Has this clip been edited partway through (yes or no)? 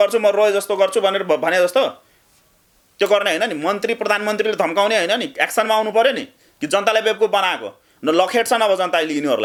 no